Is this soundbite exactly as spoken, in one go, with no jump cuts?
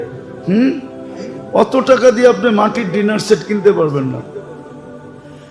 no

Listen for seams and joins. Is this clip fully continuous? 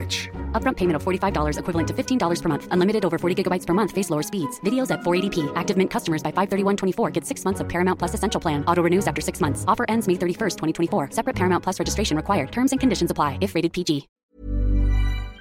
no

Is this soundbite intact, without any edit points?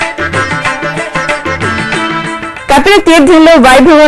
no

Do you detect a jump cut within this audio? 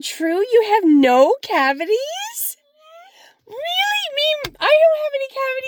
no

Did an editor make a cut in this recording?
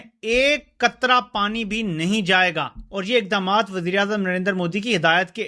yes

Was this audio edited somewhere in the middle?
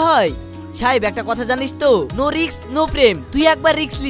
no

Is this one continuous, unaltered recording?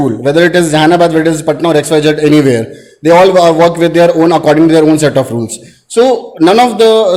yes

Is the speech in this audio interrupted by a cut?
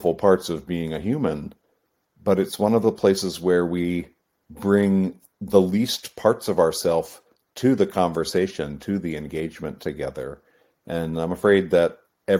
no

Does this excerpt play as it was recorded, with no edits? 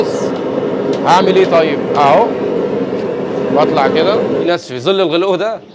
no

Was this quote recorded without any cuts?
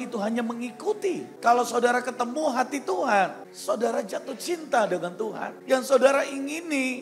no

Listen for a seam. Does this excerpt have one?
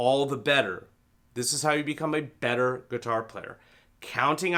no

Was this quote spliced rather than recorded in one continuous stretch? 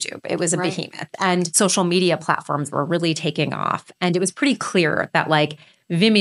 no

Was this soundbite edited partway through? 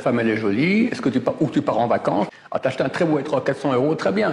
yes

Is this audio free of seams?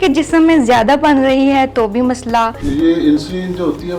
no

